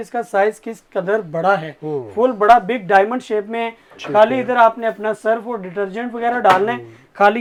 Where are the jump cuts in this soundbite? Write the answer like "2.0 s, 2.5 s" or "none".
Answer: none